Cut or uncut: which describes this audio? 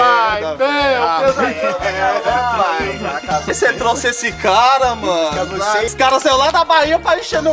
cut